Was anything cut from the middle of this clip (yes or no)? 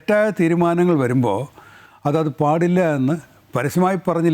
no